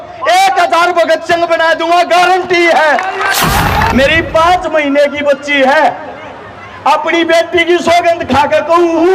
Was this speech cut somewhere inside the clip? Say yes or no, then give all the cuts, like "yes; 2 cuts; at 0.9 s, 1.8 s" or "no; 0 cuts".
yes; 1 cut; at 3.9 s